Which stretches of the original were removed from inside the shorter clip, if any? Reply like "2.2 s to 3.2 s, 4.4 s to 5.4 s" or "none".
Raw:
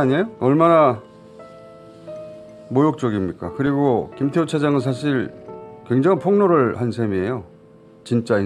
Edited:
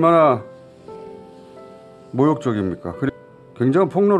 3.7 s to 5.4 s